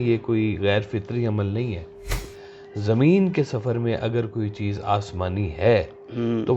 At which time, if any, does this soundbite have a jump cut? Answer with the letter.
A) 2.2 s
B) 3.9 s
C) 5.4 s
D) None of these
A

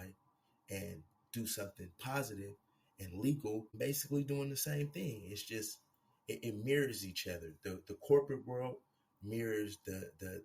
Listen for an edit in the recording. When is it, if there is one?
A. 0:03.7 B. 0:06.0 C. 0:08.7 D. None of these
A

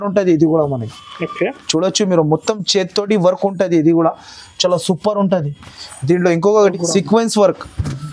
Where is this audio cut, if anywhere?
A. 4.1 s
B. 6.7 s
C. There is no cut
B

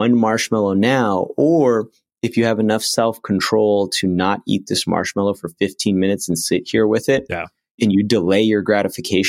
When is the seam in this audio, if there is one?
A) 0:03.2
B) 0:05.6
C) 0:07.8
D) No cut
C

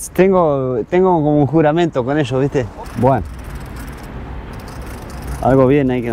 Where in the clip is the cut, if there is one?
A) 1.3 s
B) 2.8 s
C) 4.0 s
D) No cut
B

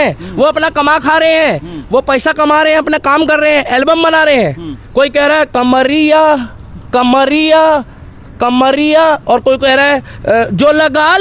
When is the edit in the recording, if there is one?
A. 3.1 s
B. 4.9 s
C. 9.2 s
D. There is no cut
D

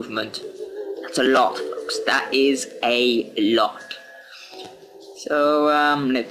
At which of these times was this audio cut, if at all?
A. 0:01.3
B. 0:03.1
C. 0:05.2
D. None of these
A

